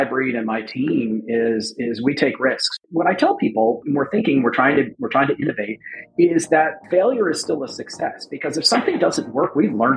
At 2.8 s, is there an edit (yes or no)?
yes